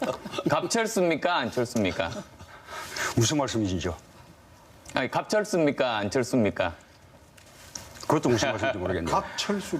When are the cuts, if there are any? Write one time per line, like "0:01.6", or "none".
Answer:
0:08.6